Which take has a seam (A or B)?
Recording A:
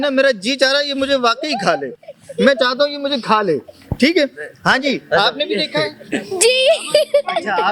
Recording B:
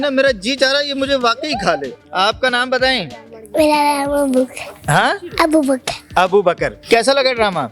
B